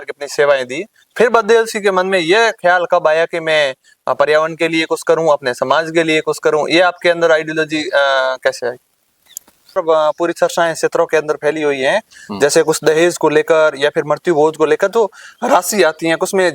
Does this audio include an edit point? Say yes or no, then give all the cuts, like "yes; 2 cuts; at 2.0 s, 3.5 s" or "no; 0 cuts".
yes; 1 cut; at 9.8 s